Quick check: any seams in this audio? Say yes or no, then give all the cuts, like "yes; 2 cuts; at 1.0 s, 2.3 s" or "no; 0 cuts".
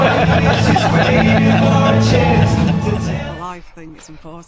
yes; 1 cut; at 3.1 s